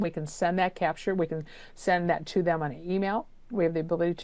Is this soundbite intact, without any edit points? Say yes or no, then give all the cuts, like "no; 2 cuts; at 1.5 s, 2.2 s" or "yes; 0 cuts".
yes; 0 cuts